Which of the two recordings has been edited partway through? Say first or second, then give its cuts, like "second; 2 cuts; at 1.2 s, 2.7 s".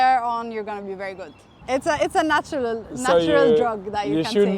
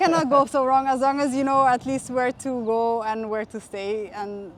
first; 1 cut; at 1.6 s